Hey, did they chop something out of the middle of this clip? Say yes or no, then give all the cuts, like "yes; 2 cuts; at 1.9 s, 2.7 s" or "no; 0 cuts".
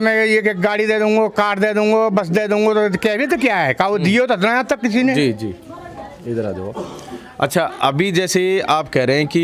no; 0 cuts